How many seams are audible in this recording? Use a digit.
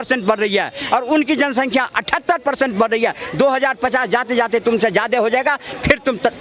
0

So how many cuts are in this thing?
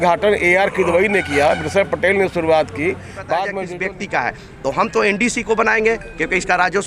1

